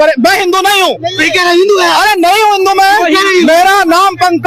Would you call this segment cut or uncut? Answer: uncut